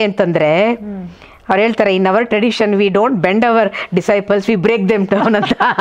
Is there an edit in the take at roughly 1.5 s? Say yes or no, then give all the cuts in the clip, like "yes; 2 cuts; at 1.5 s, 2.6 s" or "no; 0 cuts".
no; 0 cuts